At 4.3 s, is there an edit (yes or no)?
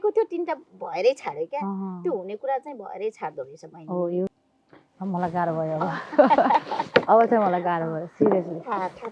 yes